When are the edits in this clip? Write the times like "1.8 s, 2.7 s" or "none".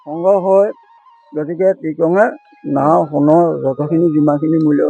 1.1 s